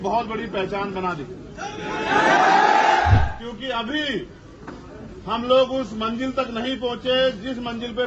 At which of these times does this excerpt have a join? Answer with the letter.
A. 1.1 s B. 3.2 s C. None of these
B